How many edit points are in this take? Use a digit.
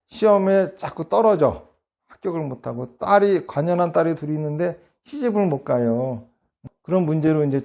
1